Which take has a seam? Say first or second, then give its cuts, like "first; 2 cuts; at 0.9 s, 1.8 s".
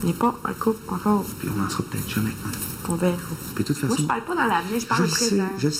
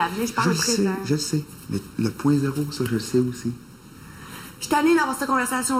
first; 1 cut; at 1.3 s